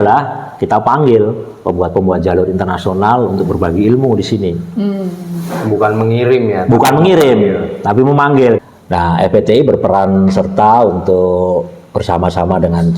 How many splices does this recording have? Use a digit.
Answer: 1